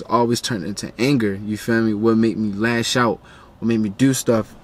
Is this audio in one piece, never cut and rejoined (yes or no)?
yes